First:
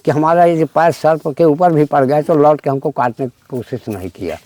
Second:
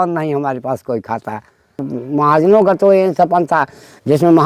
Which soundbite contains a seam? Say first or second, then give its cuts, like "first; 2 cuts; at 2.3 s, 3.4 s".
second; 1 cut; at 1.9 s